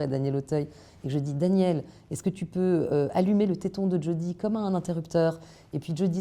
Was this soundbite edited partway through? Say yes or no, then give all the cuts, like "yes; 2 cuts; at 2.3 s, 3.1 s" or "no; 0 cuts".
no; 0 cuts